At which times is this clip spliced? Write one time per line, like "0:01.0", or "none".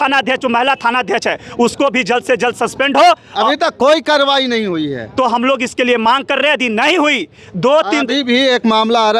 none